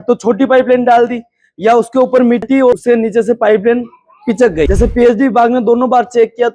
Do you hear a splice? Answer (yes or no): yes